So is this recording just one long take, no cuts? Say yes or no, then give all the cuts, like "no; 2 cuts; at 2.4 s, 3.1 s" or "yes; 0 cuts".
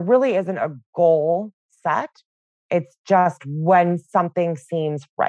yes; 0 cuts